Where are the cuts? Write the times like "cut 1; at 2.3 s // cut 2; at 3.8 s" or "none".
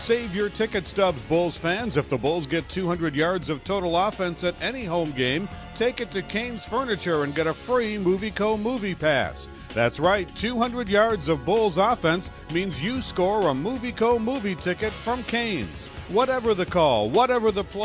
none